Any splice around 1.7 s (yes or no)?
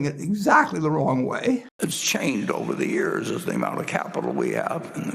yes